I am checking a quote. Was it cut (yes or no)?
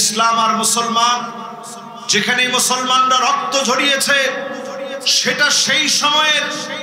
no